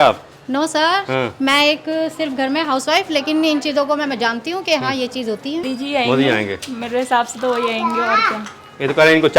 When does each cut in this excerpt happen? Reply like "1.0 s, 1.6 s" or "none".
5.6 s